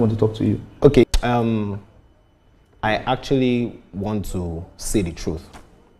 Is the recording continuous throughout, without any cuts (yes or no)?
no